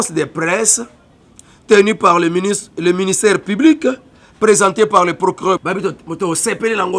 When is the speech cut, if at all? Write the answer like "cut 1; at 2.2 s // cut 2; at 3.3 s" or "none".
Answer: cut 1; at 5.6 s

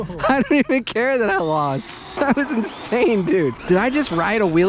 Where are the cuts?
cut 1; at 2.1 s // cut 2; at 3.6 s

